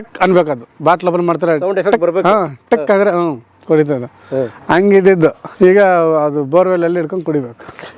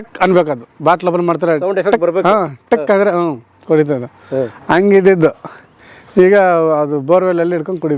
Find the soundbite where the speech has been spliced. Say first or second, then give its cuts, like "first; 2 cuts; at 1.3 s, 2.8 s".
first; 1 cut; at 5.4 s